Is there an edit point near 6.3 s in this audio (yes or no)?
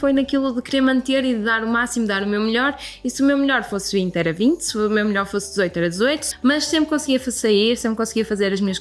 yes